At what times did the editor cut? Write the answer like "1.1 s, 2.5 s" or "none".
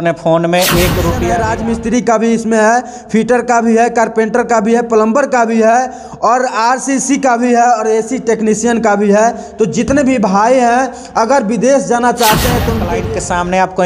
1.3 s, 13.0 s